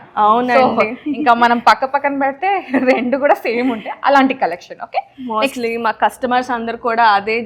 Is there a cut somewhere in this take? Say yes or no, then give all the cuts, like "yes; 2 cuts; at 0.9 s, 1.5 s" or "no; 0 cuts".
no; 0 cuts